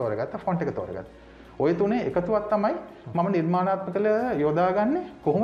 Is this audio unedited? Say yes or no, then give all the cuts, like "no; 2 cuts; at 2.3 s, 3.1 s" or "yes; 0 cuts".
yes; 0 cuts